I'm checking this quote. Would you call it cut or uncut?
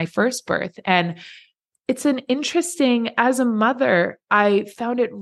uncut